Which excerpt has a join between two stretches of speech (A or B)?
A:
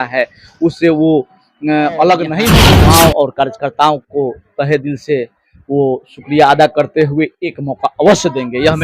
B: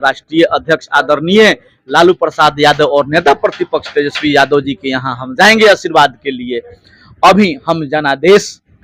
A